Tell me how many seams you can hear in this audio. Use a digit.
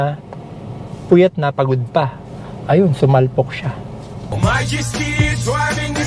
1